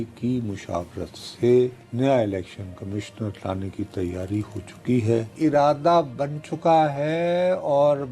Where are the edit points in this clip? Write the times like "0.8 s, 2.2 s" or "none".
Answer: 1.8 s, 5.3 s